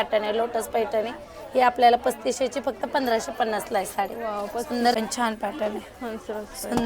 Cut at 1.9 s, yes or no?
no